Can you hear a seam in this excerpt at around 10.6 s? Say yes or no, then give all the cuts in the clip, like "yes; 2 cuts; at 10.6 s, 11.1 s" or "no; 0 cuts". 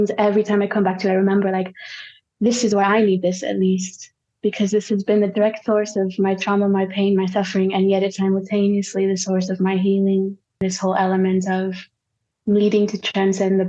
yes; 1 cut; at 10.6 s